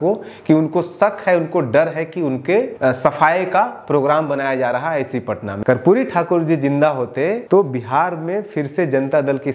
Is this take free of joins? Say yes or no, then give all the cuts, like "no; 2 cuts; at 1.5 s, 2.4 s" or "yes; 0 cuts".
no; 3 cuts; at 2.7 s, 5.5 s, 7.4 s